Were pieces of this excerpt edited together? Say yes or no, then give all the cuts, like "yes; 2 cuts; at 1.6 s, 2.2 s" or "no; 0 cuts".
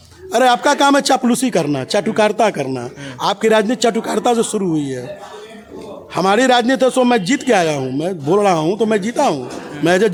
no; 0 cuts